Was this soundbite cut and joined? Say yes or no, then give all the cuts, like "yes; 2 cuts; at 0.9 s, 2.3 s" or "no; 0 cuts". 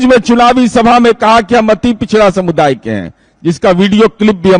no; 0 cuts